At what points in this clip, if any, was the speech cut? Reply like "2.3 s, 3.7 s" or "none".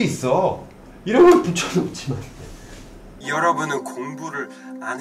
3.1 s

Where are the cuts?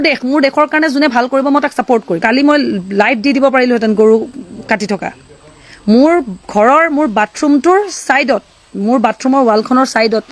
2.2 s

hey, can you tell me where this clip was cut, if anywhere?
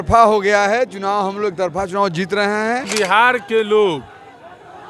2.9 s

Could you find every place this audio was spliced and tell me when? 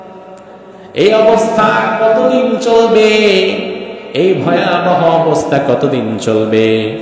none

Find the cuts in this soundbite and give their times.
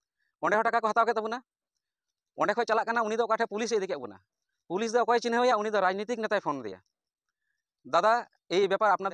none

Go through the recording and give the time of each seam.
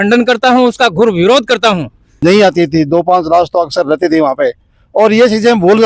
2.2 s

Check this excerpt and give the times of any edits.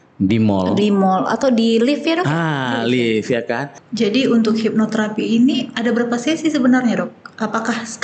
3.8 s

